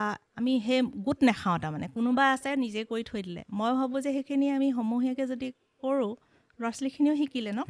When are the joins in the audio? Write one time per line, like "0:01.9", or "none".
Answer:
none